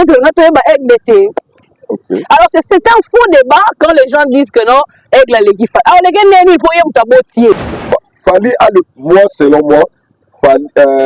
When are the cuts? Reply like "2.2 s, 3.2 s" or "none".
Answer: 7.5 s